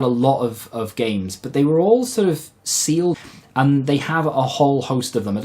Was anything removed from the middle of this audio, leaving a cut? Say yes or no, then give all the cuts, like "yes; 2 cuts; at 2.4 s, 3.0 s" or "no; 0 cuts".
yes; 1 cut; at 3.2 s